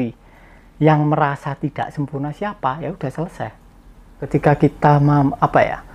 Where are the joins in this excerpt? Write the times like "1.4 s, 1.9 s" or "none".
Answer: 4.3 s